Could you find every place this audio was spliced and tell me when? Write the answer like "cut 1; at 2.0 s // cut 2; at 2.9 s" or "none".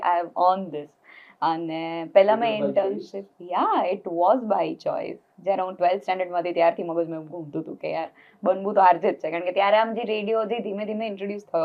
none

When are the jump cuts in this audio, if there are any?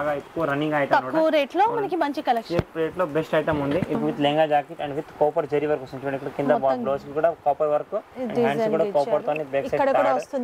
cut 1; at 4.0 s

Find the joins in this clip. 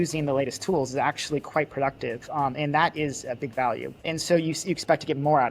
cut 1; at 4.1 s

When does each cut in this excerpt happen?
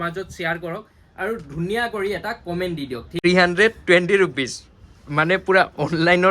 cut 1; at 3.1 s

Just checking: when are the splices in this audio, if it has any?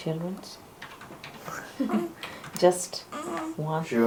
none

